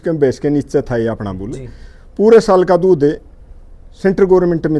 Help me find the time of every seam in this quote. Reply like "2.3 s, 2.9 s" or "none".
none